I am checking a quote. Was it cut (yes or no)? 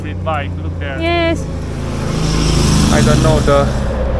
yes